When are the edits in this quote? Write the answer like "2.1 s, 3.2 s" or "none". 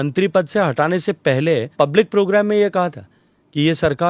1.7 s